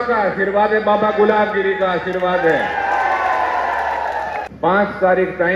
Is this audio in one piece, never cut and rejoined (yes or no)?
no